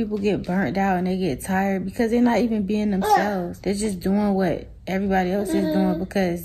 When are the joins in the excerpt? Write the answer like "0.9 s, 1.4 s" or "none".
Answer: 3.5 s